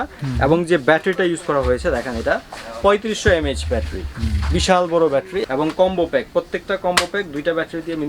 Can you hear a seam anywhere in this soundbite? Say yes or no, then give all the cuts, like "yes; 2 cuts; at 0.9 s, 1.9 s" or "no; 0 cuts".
yes; 1 cut; at 5.4 s